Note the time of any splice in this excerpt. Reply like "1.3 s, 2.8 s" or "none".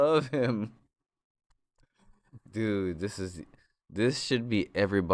none